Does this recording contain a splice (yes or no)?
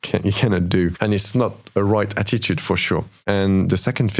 yes